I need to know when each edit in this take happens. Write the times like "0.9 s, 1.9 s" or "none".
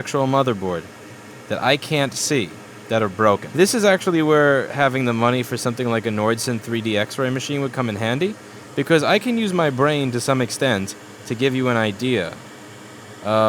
3.5 s